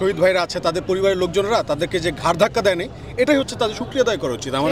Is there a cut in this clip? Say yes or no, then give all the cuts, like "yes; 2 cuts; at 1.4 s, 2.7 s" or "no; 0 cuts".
no; 0 cuts